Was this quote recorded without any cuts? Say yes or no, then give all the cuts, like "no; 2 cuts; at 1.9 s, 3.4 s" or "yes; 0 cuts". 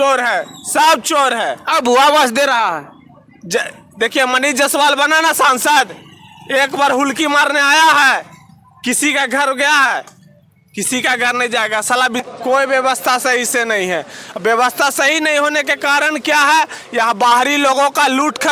no; 1 cut; at 12.2 s